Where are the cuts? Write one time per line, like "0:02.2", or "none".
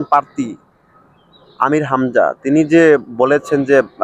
none